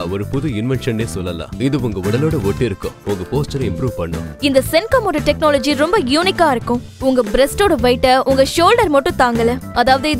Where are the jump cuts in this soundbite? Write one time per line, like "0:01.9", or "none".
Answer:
0:04.3